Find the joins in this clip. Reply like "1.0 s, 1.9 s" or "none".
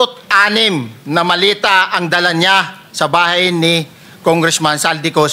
none